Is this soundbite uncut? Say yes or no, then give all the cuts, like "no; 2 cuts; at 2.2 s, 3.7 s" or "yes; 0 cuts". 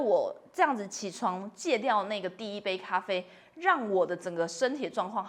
yes; 0 cuts